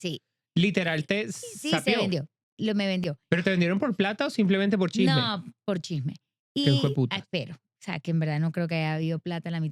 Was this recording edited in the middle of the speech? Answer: no; 0 cuts

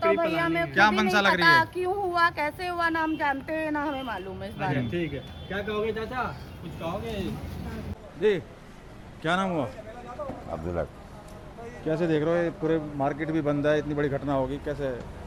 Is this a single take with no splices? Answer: yes; 0 cuts

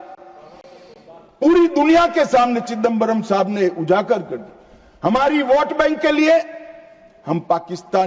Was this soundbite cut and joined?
no; 0 cuts

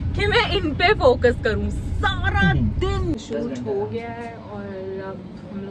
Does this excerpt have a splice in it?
yes; 1 cut; at 3.1 s

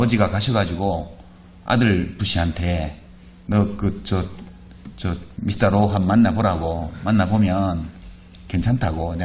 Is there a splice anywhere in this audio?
no; 0 cuts

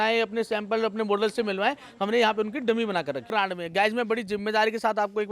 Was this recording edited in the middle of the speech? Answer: yes; 1 cut; at 3.3 s

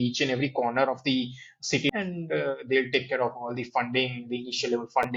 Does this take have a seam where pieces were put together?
no; 0 cuts

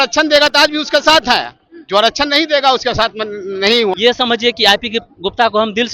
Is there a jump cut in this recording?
yes; 1 cut; at 3.9 s

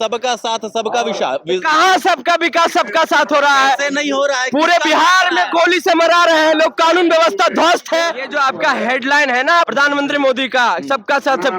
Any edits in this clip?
yes; 2 cuts; at 8.2 s, 9.7 s

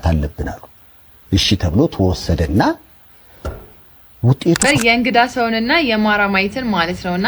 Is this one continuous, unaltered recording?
no; 1 cut; at 4.6 s

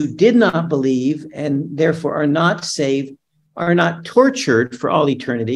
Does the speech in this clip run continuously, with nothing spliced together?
yes; 0 cuts

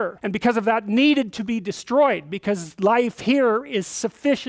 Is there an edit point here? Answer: no; 0 cuts

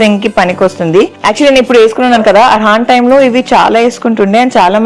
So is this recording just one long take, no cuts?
no; 1 cut; at 1.2 s

